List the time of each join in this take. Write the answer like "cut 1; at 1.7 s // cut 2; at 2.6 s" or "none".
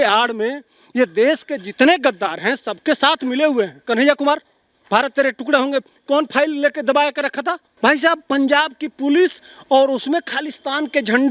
cut 1; at 3.8 s // cut 2; at 7.7 s